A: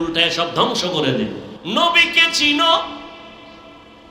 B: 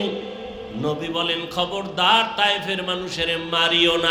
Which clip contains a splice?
A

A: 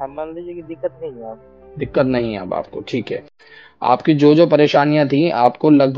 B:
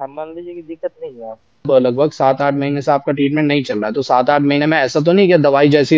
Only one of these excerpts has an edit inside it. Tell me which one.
B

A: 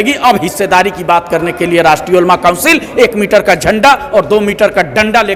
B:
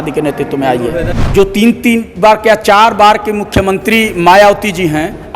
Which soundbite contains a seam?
B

